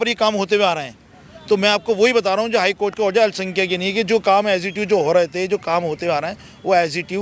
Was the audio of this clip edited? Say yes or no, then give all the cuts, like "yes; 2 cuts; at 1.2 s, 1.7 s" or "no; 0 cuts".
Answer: no; 0 cuts